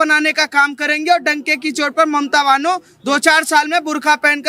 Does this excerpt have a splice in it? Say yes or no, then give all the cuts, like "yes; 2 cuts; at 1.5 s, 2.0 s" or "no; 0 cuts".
no; 0 cuts